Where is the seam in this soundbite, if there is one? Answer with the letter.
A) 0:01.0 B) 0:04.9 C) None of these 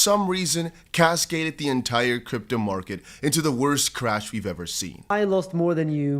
B